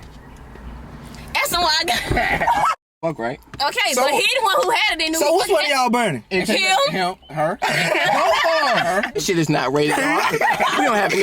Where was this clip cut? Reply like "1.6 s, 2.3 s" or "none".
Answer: 2.7 s, 9.2 s